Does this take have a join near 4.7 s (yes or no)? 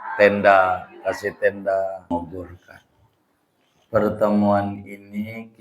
no